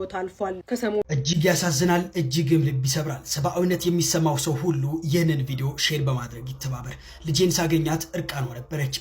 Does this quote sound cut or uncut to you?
cut